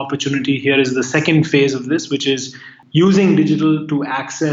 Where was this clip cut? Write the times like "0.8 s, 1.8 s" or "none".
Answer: 2.7 s